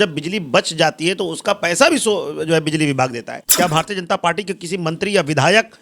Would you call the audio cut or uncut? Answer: cut